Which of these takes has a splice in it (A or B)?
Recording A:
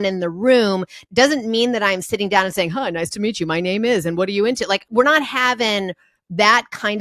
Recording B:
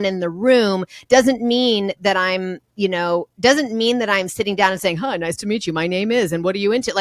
A